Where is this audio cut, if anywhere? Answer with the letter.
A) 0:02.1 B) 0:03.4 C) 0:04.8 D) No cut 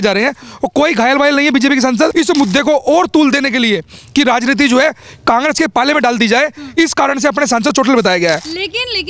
A